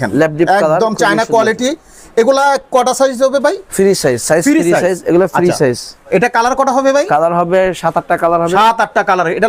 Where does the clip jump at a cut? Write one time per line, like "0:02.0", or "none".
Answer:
none